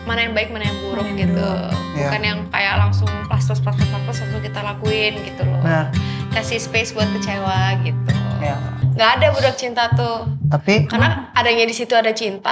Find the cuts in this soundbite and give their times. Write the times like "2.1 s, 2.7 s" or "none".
8.8 s